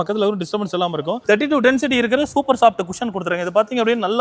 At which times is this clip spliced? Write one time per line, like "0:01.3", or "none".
0:01.2